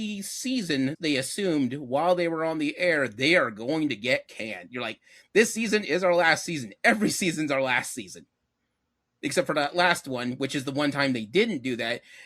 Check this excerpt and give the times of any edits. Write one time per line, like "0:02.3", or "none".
0:01.0